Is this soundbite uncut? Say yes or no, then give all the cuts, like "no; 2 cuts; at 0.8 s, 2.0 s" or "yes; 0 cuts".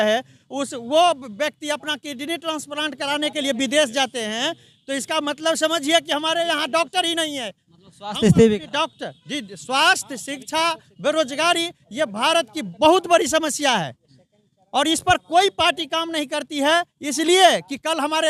yes; 0 cuts